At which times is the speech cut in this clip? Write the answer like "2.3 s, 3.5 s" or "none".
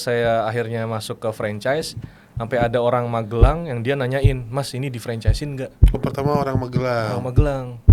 none